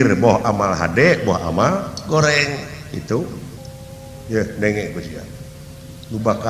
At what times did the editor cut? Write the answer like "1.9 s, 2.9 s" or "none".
none

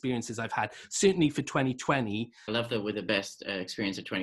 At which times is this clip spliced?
2.4 s

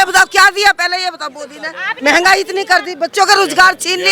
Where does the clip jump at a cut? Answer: 1.9 s

